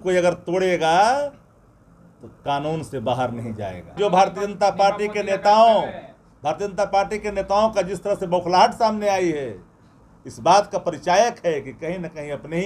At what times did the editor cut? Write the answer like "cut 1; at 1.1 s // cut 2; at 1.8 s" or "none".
cut 1; at 3.9 s